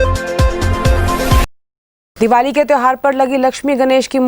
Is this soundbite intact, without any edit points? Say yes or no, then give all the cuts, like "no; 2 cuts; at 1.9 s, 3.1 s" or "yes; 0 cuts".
no; 1 cut; at 1.6 s